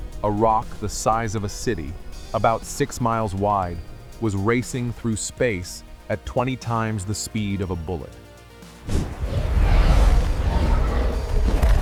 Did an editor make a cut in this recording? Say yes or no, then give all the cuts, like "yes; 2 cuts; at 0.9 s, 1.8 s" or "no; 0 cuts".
no; 0 cuts